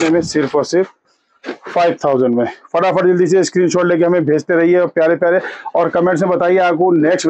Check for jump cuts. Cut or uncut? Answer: uncut